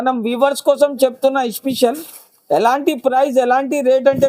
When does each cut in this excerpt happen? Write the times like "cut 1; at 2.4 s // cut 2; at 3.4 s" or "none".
none